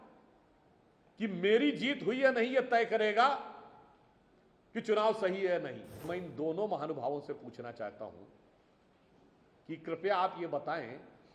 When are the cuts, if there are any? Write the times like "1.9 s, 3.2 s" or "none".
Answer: 6.1 s